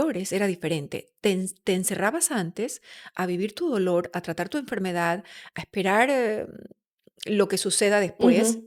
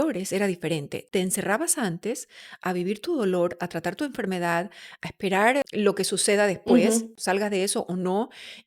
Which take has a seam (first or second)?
second